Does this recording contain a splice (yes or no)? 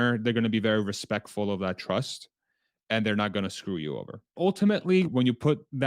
yes